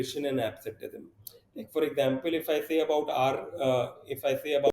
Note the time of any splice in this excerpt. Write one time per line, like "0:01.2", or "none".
none